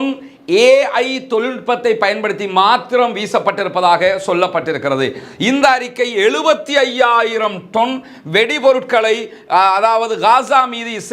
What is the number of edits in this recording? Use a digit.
0